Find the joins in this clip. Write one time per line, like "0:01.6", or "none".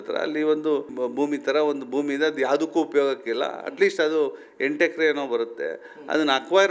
0:00.9